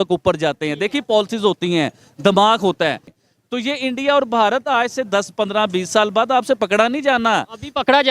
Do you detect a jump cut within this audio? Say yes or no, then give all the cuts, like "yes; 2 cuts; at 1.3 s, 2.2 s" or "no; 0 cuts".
yes; 1 cut; at 3.1 s